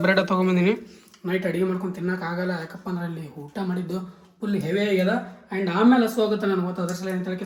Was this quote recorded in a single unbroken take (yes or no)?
yes